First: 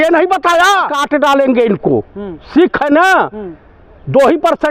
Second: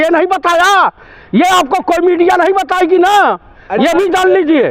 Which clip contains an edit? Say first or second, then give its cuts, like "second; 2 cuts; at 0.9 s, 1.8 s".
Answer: first; 1 cut; at 1.0 s